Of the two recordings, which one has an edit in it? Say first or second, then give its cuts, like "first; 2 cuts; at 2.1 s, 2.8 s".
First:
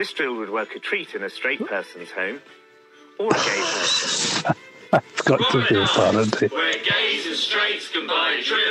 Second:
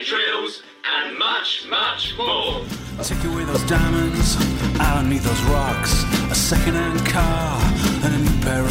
second; 1 cut; at 2.9 s